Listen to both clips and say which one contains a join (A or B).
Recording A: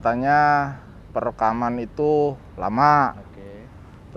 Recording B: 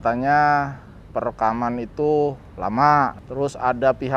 B